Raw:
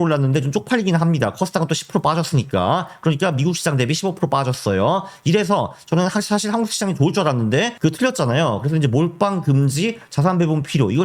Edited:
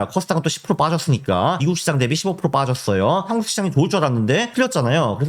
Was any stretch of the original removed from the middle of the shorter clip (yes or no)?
yes